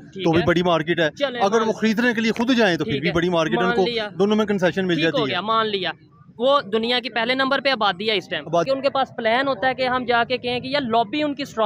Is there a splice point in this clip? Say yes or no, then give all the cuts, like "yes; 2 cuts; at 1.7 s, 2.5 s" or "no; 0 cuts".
yes; 1 cut; at 8.7 s